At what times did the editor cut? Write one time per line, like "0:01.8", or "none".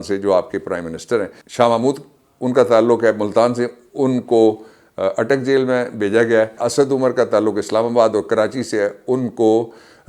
0:01.5
0:06.6

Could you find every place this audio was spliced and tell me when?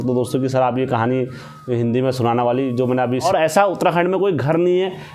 0:03.2

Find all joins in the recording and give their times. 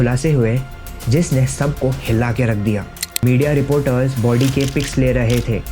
0:03.0

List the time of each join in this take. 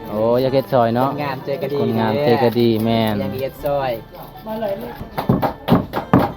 0:05.1

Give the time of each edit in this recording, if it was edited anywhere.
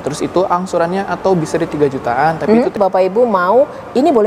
0:02.8

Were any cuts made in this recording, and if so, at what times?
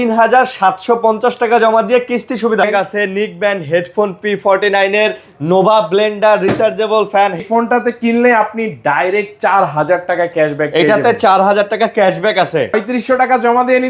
0:02.6
0:07.4
0:12.8

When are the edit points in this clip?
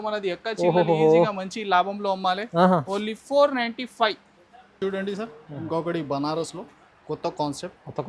none

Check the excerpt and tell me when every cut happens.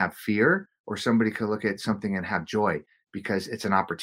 none

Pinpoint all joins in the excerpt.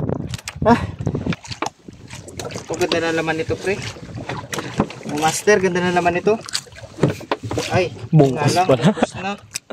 0:01.5

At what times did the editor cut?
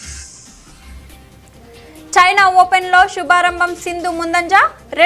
0:01.1

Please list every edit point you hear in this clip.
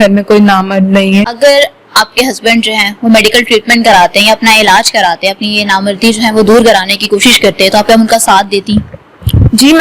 0:01.3

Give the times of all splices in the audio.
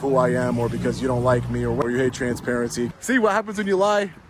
0:01.8
0:02.9

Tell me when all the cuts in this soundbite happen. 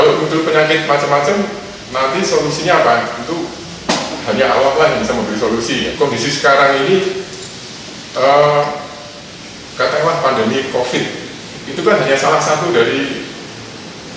0:05.9

